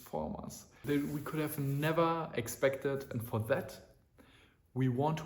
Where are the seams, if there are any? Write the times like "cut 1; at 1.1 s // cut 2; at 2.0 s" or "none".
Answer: cut 1; at 0.8 s // cut 2; at 3.1 s